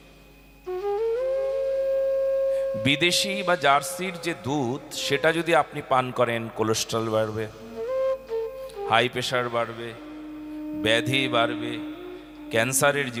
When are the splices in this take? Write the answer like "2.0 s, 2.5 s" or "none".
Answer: none

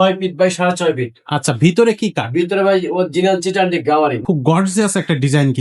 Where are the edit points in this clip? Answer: 4.2 s

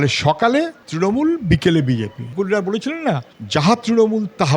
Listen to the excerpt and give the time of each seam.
2.2 s

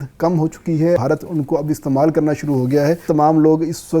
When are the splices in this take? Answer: 1.0 s, 3.0 s

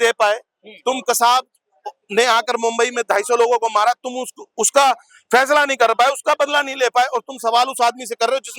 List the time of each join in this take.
none

